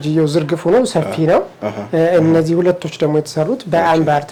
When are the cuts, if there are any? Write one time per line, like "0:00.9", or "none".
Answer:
none